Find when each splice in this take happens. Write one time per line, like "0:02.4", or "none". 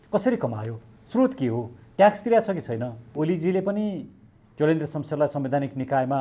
0:03.1